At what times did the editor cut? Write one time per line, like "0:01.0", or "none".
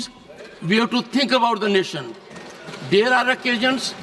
none